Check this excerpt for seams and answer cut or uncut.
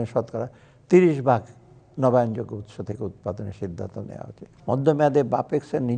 cut